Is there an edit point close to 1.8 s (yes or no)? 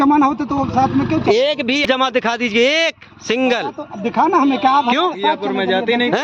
yes